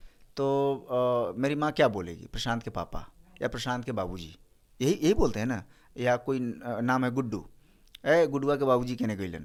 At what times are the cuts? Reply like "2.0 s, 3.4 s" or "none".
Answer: none